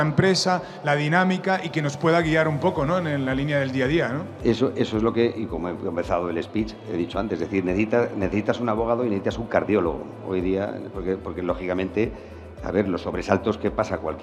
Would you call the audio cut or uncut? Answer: uncut